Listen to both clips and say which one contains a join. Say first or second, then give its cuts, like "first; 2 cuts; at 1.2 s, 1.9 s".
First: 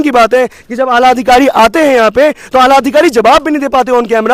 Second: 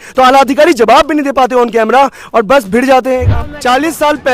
second; 1 cut; at 3.3 s